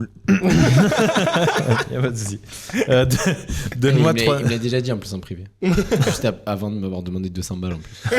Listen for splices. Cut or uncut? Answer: uncut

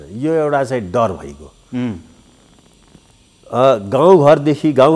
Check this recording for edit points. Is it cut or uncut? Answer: uncut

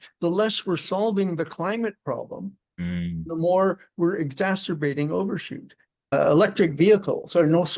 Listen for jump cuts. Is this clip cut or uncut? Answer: cut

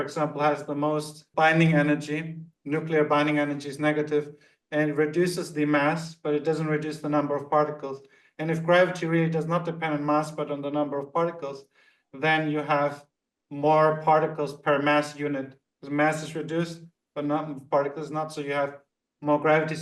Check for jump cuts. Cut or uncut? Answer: cut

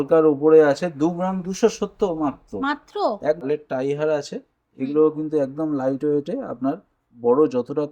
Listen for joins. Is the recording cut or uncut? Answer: cut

